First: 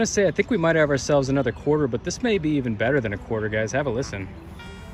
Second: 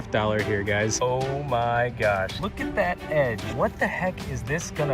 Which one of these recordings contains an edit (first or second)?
second